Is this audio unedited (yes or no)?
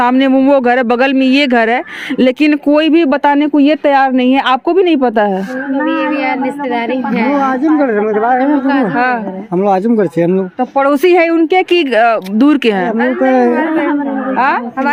yes